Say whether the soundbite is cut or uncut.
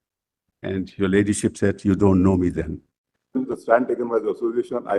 cut